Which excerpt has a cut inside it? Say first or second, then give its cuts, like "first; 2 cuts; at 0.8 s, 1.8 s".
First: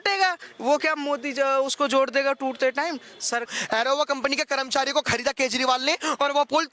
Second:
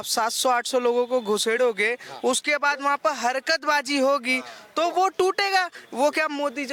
first; 1 cut; at 3.5 s